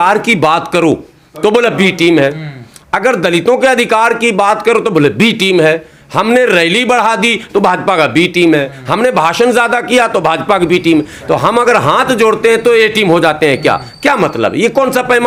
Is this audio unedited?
yes; 0 cuts

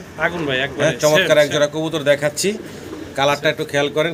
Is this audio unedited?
yes; 0 cuts

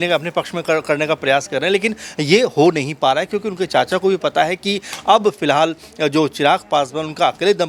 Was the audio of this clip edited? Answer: no; 0 cuts

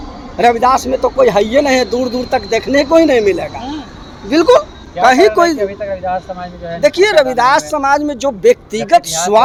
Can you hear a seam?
no; 0 cuts

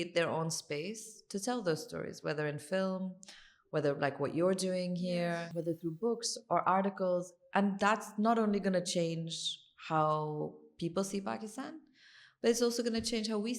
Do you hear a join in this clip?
yes; 1 cut; at 5.5 s

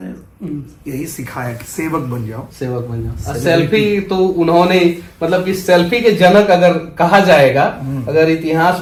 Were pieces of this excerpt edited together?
no; 0 cuts

